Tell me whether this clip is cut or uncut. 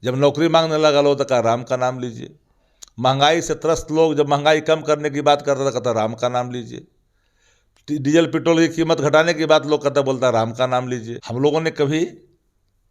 cut